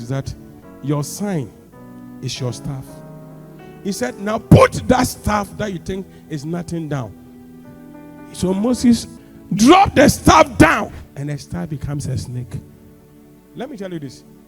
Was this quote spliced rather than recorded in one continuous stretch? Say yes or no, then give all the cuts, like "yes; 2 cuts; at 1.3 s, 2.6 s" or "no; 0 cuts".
yes; 2 cuts; at 9.2 s, 11.0 s